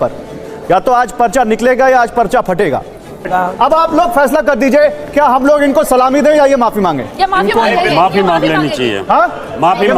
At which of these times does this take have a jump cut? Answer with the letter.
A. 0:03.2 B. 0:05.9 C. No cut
A